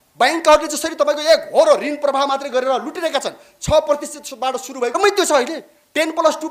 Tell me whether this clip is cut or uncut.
cut